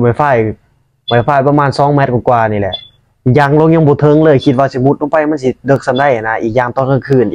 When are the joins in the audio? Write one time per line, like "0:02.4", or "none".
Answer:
none